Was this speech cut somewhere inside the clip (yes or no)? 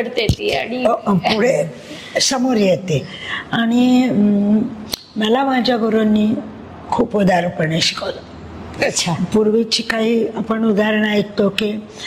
no